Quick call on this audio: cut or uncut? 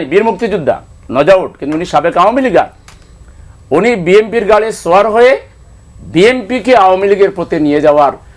uncut